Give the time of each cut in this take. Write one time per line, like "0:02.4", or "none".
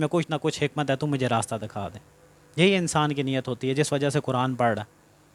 none